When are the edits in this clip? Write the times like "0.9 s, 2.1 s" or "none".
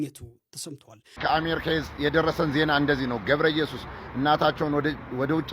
1.2 s